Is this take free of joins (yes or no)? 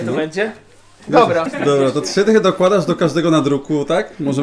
no